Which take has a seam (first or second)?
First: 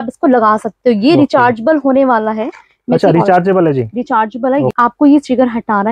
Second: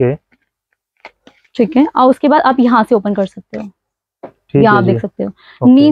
first